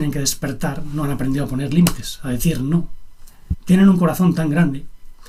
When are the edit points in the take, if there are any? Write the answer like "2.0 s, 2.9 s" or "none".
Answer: none